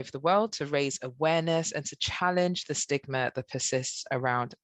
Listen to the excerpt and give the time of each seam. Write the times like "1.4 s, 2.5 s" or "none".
none